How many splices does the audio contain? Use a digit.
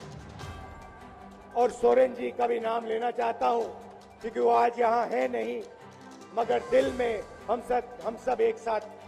0